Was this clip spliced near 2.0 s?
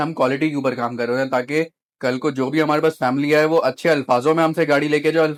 no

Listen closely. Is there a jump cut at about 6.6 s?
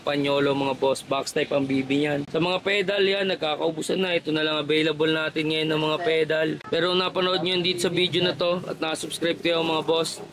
yes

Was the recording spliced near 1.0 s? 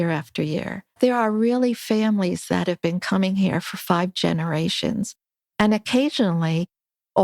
yes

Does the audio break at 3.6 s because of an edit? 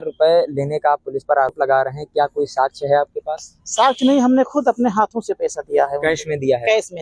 no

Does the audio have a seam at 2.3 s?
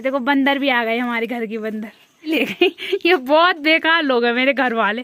yes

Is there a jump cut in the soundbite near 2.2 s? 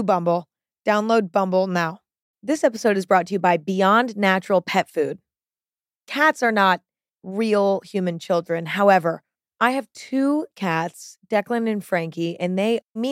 yes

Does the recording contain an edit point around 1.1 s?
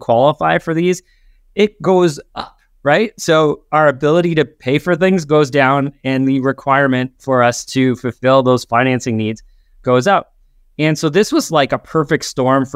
no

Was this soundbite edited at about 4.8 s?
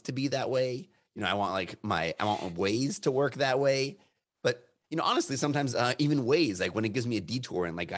no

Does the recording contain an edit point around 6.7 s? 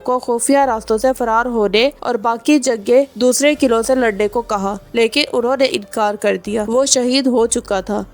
yes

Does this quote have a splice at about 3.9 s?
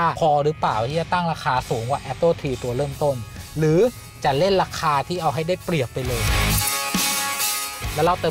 no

